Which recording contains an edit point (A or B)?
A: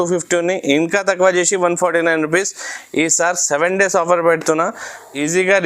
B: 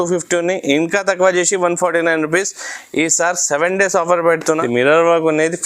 B